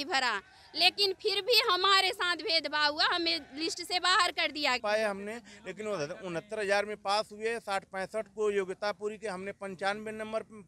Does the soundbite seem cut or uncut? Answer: cut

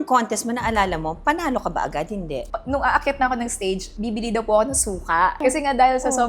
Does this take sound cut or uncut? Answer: cut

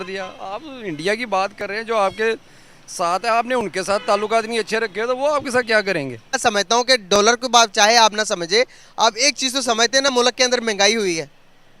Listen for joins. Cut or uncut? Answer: cut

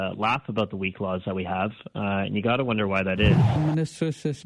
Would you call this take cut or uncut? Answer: cut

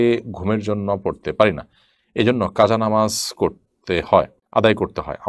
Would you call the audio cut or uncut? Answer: cut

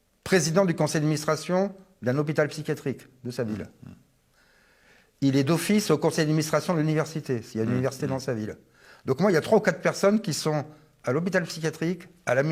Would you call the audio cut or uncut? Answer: uncut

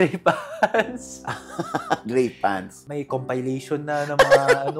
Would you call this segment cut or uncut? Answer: cut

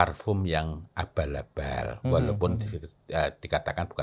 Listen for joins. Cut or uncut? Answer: uncut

